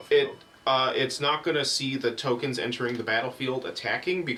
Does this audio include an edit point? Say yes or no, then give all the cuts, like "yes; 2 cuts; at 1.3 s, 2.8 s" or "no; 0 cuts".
no; 0 cuts